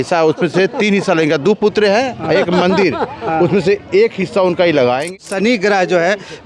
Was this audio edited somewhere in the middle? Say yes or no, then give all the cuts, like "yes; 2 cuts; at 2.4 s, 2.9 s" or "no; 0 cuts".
yes; 1 cut; at 5.1 s